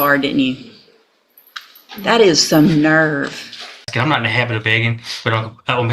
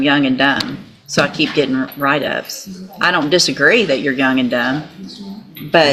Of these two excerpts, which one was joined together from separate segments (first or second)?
first